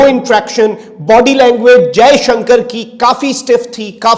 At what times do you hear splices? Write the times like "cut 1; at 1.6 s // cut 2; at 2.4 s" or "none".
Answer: none